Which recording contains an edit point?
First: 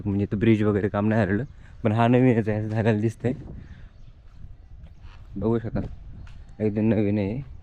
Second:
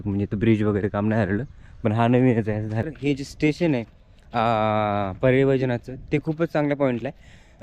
second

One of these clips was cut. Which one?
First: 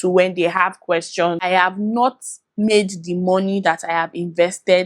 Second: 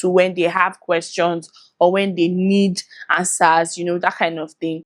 first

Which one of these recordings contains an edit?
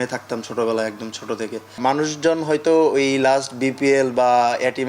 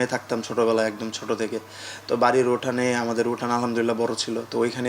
first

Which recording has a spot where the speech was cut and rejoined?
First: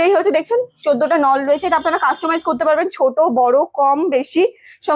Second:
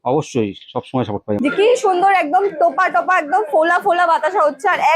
second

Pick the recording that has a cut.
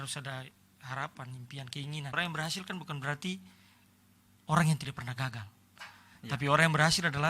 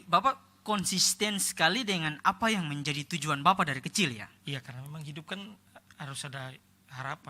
first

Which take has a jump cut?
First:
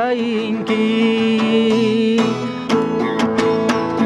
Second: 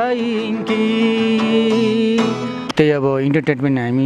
second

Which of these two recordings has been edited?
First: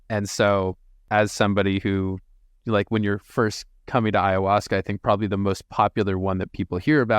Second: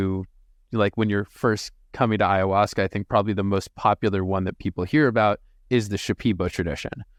first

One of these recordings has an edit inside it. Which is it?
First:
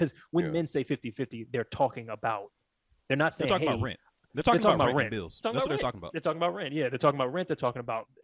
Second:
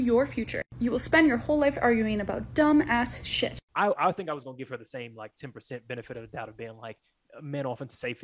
second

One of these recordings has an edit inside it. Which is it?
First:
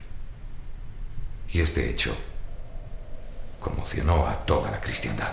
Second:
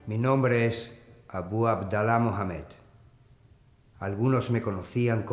second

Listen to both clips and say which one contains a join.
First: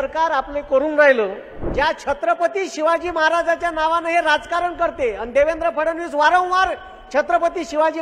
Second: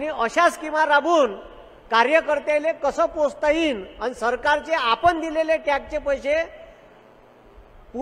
first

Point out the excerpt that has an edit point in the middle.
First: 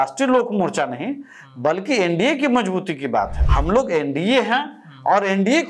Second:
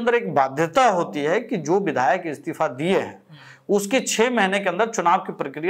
first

